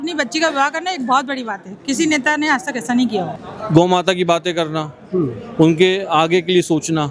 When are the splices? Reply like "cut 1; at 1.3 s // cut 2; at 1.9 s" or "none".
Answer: cut 1; at 3.3 s